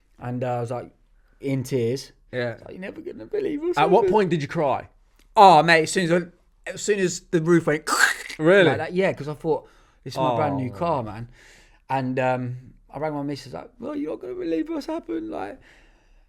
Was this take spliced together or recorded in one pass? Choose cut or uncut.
uncut